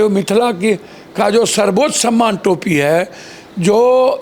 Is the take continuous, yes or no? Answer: yes